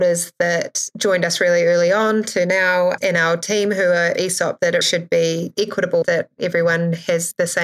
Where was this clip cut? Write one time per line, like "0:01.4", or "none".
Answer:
0:03.0
0:04.8
0:06.0